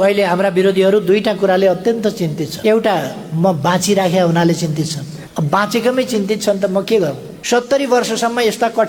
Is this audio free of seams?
no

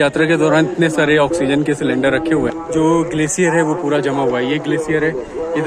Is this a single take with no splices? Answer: no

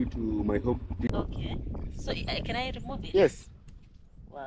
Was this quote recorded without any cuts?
no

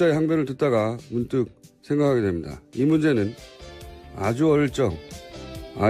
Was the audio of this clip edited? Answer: no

